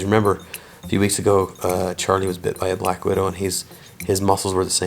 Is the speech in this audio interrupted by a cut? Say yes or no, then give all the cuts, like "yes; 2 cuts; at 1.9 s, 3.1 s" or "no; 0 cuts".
no; 0 cuts